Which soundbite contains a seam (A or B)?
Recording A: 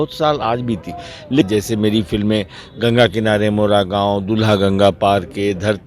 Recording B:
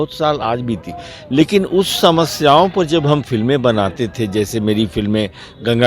A